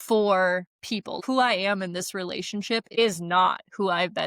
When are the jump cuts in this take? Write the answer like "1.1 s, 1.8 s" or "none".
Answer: 1.2 s